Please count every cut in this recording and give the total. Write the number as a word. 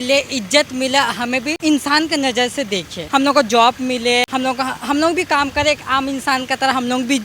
three